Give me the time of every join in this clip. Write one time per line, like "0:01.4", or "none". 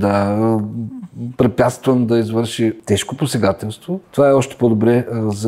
0:02.8
0:04.1